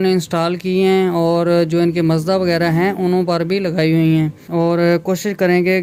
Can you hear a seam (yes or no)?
no